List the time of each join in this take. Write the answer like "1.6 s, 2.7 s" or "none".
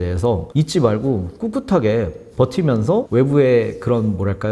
none